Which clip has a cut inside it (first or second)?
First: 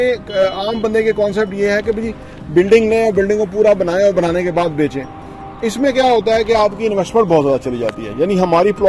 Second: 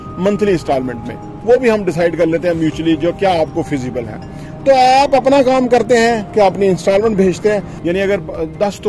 second